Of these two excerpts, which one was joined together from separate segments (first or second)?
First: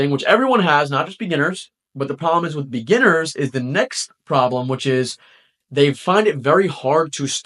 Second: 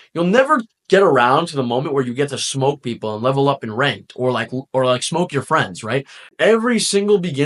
second